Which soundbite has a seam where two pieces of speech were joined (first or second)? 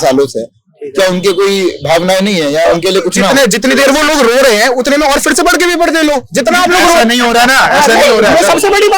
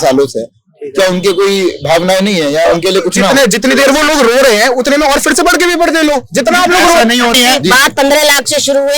second